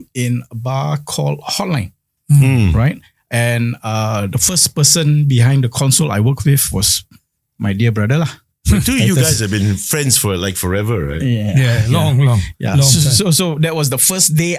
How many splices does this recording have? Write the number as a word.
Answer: zero